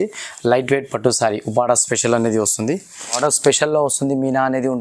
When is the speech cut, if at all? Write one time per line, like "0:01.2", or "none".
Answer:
0:03.2